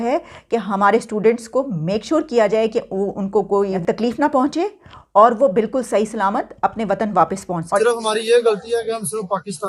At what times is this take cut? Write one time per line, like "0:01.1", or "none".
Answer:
0:07.8